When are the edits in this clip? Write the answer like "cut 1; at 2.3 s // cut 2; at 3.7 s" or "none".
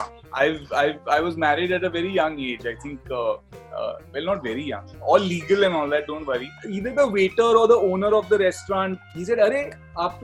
cut 1; at 6.7 s // cut 2; at 9.0 s